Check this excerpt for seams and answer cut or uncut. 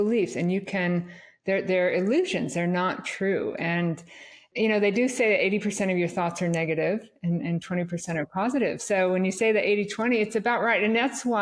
cut